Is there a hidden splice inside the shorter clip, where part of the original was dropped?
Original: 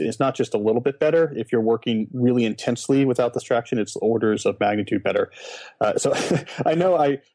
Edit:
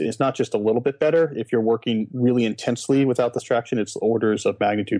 no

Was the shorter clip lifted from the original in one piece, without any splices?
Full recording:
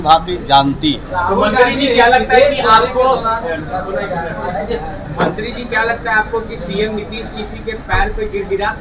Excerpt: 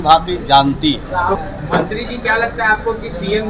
no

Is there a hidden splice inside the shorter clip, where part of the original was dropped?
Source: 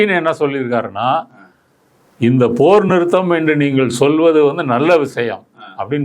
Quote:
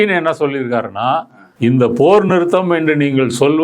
yes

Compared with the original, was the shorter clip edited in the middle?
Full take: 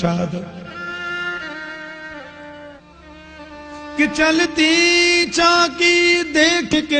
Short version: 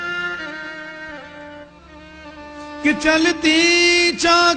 yes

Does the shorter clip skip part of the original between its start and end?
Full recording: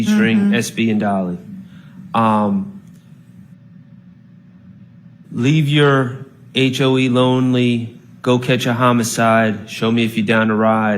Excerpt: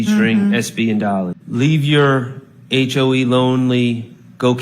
yes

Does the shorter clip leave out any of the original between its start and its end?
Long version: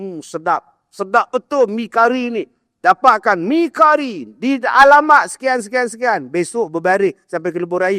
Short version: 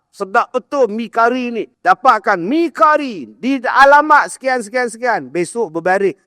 yes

